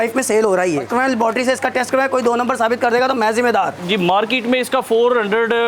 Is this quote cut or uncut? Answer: cut